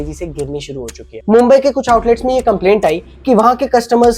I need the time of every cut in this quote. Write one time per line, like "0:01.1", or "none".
0:01.1